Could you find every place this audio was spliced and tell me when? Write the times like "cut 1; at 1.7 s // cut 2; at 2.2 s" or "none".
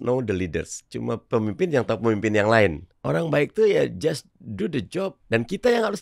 cut 1; at 2.9 s // cut 2; at 5.2 s